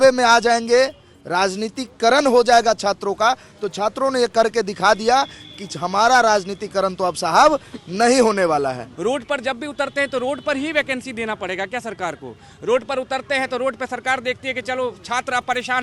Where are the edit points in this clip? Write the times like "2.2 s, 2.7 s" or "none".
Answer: 8.9 s